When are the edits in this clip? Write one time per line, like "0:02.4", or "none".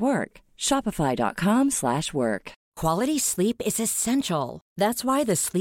0:02.6

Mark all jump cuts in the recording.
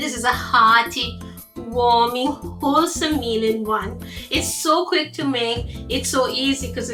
none

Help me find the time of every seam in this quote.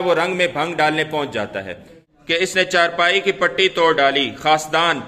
0:02.4

